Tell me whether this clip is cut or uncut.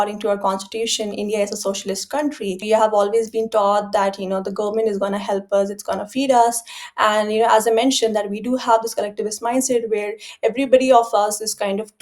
cut